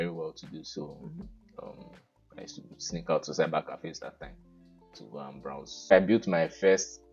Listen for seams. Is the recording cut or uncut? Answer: cut